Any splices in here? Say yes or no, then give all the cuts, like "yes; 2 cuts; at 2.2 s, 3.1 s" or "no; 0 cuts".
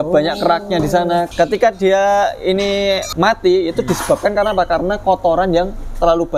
yes; 2 cuts; at 1.3 s, 3.1 s